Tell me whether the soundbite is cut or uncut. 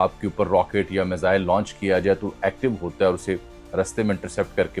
uncut